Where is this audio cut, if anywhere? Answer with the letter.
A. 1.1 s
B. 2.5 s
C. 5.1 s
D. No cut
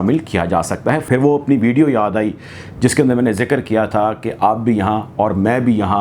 A